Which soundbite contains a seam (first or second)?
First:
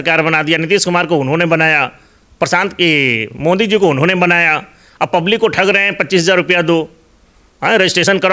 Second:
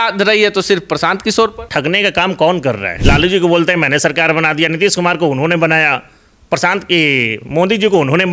second